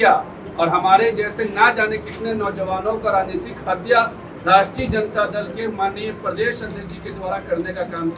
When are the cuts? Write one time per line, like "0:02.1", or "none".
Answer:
none